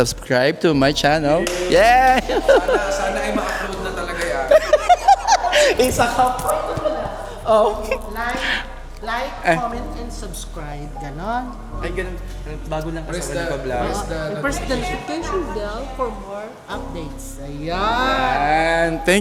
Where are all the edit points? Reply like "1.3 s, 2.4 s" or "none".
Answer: none